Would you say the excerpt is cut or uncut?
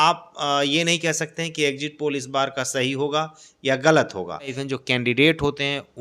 cut